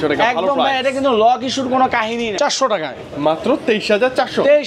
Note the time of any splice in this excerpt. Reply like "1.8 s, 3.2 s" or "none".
2.3 s